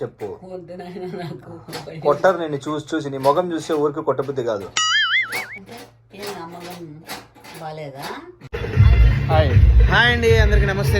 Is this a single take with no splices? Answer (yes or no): no